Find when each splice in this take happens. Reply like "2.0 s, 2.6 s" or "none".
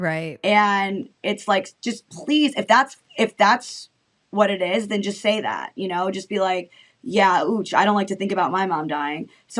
none